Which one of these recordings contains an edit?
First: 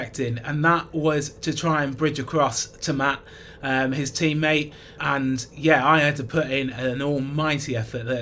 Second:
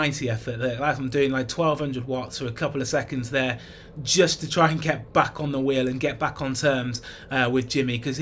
first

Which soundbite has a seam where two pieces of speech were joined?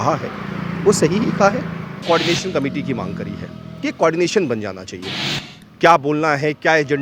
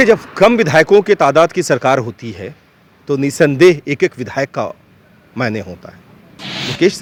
first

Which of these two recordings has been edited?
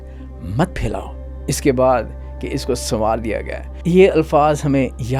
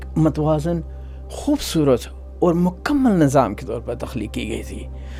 first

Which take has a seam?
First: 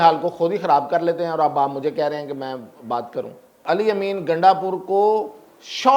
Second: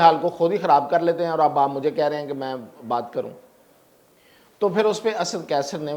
first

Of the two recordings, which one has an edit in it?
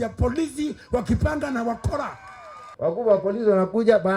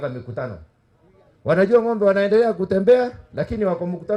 first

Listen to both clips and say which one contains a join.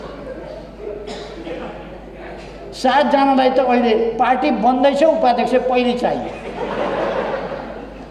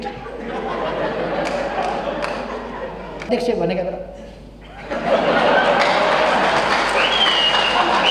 second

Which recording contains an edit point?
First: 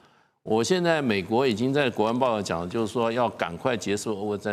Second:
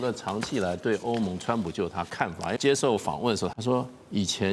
second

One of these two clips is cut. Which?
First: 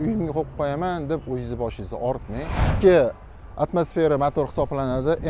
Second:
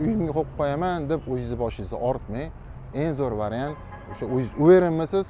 first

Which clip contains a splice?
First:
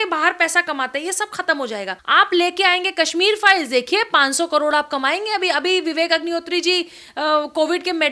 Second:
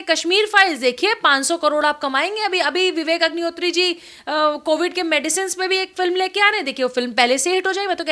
first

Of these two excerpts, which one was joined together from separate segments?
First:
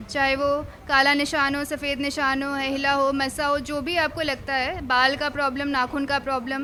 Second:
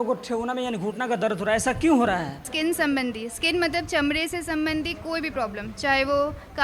second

